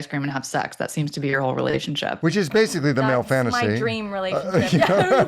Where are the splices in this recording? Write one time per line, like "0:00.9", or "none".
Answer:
none